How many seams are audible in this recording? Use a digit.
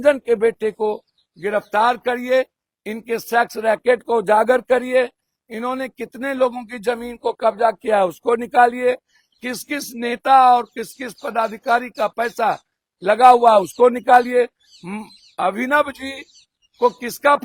0